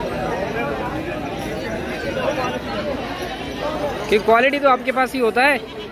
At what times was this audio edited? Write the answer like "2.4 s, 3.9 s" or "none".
none